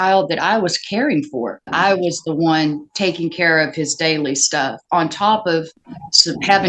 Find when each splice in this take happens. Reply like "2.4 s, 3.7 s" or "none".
1.7 s